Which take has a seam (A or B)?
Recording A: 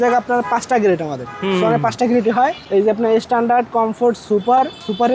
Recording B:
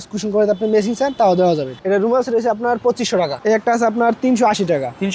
B